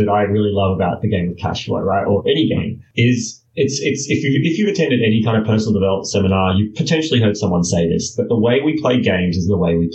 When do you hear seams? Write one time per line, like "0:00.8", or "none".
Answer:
0:02.8